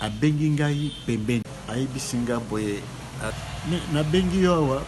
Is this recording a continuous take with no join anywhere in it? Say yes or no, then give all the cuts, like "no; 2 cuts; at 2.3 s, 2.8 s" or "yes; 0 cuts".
no; 1 cut; at 3.3 s